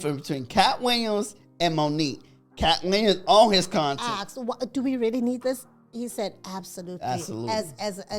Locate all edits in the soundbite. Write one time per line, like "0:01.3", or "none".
0:03.9